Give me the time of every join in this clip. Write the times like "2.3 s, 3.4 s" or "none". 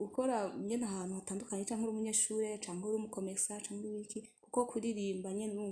none